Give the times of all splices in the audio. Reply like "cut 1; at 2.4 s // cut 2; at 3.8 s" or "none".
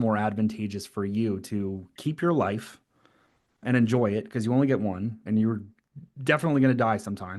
cut 1; at 3.6 s // cut 2; at 5.2 s